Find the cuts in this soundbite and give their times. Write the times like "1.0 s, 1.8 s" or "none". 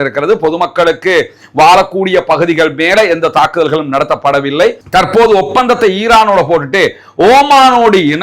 4.8 s